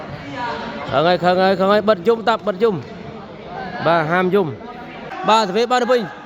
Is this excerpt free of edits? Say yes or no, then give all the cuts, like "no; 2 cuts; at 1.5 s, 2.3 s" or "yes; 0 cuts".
no; 1 cut; at 5.1 s